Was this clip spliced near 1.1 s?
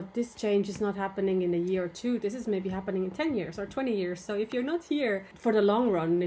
no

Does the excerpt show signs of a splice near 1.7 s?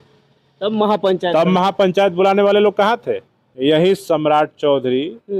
no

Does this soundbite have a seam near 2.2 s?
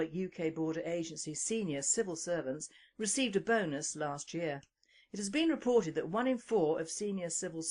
no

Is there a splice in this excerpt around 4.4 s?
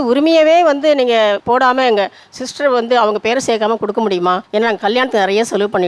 yes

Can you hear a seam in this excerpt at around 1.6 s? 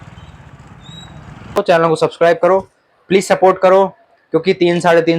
yes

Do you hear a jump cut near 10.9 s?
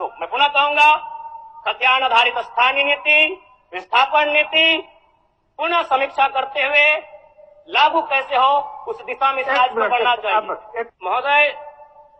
yes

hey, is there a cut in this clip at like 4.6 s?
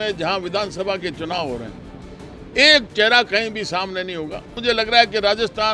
yes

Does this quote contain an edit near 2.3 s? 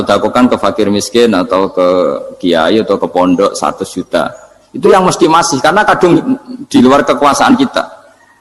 no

